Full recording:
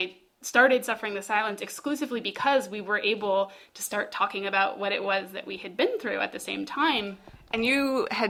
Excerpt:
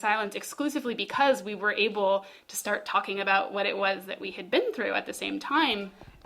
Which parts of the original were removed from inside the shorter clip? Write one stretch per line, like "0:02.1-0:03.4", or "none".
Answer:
none